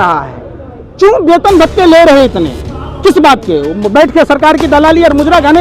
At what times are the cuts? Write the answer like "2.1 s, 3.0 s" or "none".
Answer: none